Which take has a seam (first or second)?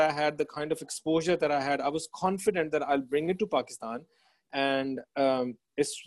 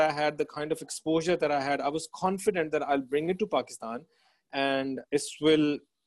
second